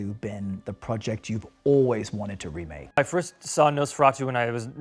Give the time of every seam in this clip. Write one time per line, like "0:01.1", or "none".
0:03.0